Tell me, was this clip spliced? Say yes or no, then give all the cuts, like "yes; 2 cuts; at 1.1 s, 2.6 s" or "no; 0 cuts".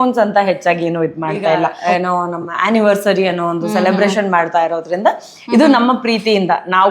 yes; 1 cut; at 1.7 s